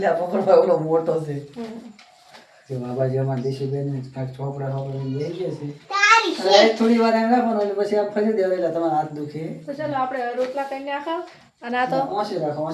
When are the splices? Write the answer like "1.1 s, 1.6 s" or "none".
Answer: none